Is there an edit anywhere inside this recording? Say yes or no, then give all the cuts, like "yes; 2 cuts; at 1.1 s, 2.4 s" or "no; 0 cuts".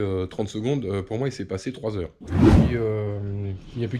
yes; 2 cuts; at 2.1 s, 2.7 s